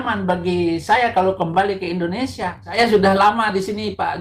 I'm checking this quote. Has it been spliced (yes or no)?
yes